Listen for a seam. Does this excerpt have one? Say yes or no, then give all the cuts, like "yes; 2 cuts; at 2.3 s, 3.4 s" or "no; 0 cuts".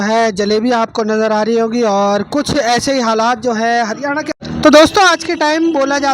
yes; 1 cut; at 4.3 s